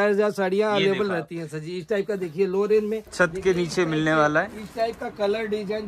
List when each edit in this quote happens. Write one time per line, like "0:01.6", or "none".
0:03.0

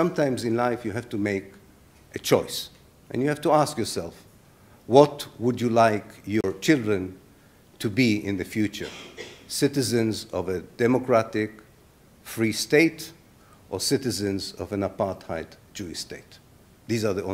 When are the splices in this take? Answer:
none

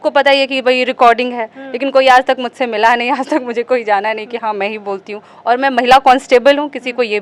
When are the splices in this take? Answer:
none

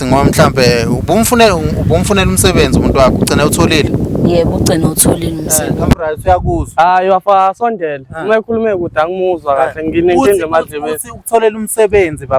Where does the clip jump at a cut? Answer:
0:06.0

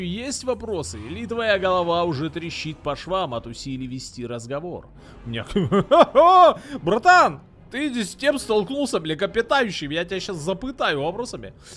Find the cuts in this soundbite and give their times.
none

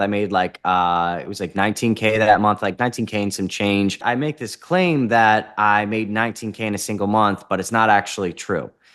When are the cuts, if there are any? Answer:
0:04.0

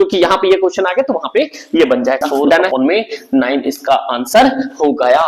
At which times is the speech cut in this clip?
0:02.7

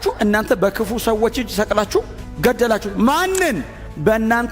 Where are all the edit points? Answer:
0:02.9

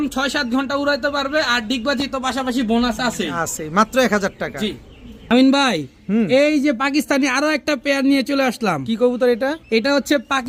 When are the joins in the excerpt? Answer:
none

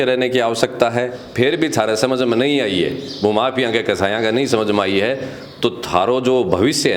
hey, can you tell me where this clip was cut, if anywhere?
0:01.2

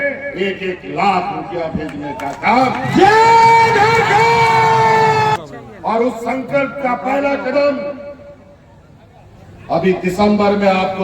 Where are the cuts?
0:05.4

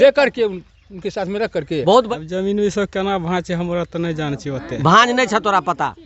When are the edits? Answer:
0:02.1

